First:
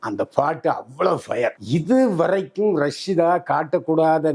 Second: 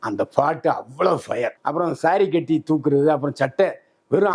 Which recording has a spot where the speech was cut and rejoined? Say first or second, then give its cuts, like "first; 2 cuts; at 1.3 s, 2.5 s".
second; 1 cut; at 1.6 s